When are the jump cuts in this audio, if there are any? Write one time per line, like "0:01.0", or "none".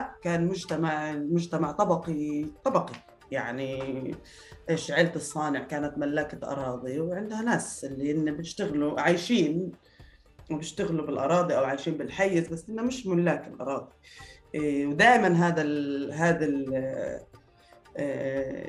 none